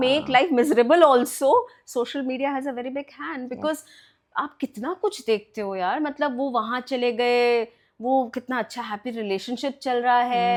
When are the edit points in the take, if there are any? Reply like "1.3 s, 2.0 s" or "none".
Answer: none